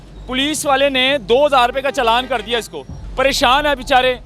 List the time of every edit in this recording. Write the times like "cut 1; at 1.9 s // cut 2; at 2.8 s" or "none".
cut 1; at 3.0 s